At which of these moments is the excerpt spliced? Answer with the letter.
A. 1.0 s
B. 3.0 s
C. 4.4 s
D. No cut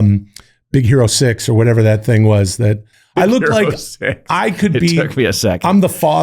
B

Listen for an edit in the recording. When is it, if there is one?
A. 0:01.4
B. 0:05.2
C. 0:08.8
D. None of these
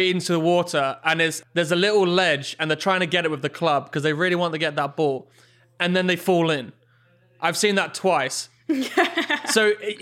A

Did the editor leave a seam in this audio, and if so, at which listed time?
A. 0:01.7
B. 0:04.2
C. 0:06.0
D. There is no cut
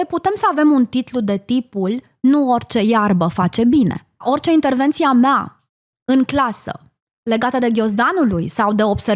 B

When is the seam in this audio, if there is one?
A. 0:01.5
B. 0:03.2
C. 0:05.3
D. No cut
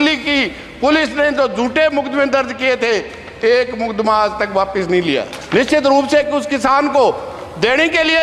C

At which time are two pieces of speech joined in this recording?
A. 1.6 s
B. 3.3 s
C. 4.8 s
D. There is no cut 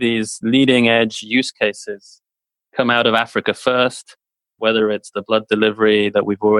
D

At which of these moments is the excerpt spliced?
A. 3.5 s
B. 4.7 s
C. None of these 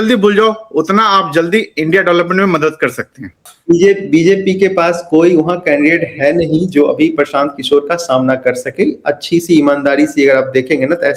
A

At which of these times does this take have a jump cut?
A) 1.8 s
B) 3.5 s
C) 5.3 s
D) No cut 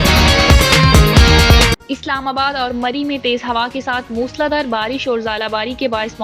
A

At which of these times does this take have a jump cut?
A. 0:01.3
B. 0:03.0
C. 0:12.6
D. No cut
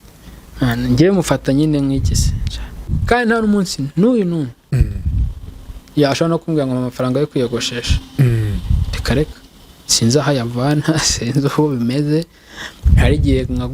B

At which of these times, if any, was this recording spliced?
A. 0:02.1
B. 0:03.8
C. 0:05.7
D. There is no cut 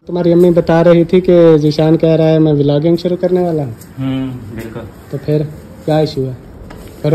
D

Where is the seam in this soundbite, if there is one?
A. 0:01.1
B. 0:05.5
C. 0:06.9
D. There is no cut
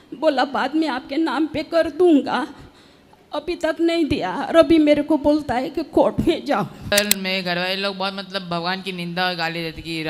C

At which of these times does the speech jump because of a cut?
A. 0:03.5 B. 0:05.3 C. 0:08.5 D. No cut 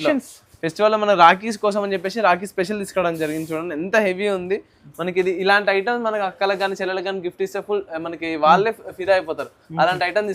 D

